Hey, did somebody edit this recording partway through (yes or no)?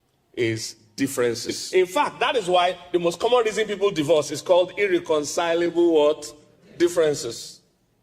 yes